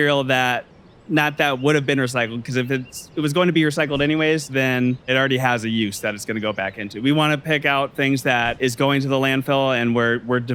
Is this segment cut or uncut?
cut